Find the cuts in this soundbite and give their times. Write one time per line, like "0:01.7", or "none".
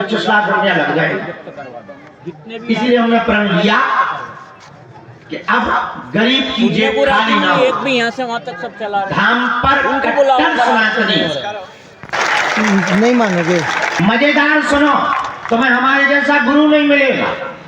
0:13.9